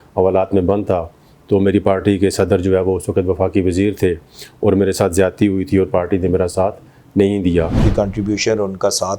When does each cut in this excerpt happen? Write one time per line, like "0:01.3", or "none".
0:07.7